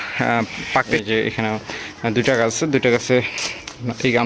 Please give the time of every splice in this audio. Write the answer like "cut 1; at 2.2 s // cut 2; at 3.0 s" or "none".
cut 1; at 1.0 s